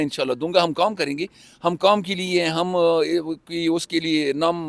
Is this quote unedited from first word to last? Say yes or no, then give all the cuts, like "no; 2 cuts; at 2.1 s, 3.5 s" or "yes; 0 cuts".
yes; 0 cuts